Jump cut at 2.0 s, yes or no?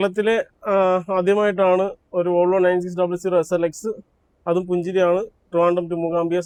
no